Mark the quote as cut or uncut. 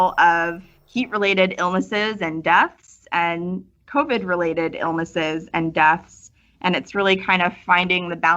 uncut